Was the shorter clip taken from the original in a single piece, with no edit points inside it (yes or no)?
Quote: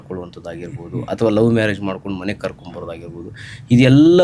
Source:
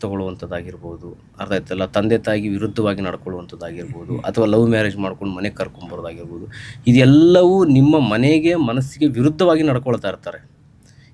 yes